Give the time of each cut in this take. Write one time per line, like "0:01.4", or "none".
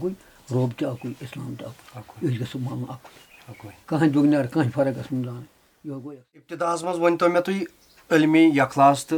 0:06.6